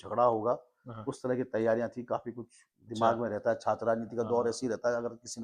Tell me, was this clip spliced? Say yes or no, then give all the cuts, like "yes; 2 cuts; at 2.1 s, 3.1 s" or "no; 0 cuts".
no; 0 cuts